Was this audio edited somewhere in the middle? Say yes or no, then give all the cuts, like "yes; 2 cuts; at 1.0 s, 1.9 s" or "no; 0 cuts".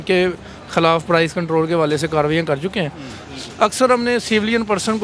yes; 1 cut; at 3.2 s